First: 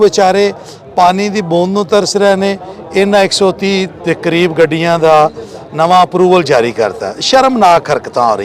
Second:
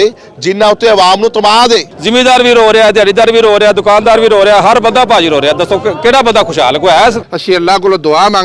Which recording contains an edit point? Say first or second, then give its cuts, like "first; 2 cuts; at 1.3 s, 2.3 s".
second; 2 cuts; at 2.0 s, 7.3 s